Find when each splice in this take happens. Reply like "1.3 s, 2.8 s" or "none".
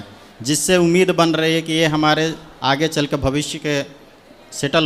none

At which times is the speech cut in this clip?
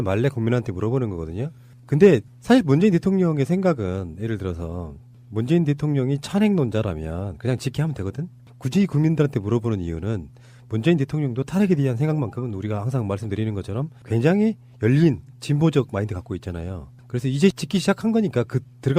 12.4 s

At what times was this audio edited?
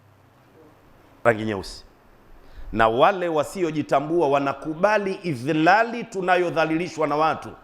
1.2 s

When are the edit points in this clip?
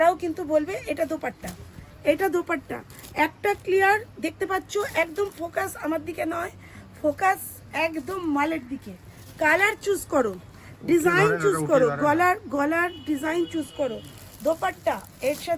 none

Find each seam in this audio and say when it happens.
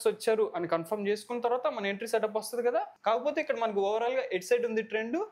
2.9 s

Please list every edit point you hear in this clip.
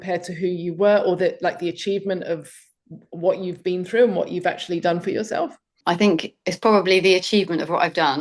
5.7 s

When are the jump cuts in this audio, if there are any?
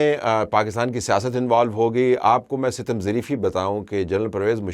none

